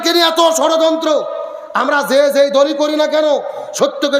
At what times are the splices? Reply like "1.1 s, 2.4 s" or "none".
none